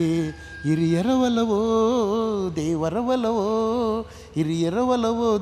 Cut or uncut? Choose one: uncut